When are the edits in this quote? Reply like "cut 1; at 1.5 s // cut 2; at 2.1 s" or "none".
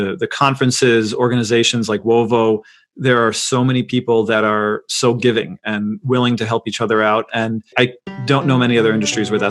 cut 1; at 7.7 s